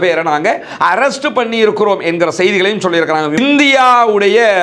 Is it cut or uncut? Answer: cut